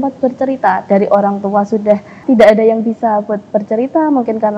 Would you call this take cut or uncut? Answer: cut